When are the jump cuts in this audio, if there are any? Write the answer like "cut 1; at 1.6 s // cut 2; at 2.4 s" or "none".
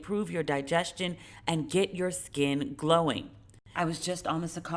cut 1; at 3.6 s